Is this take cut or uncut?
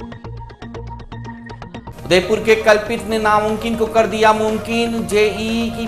cut